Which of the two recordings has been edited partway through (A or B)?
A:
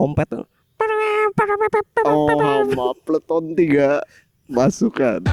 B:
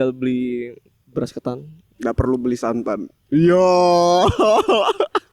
B